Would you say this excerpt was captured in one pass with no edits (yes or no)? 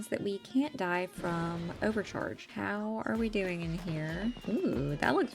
no